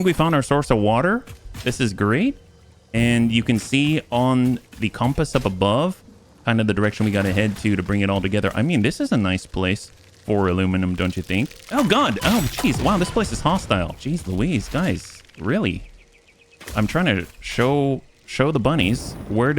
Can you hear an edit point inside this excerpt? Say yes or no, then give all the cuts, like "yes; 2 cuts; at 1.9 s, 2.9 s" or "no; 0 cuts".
no; 0 cuts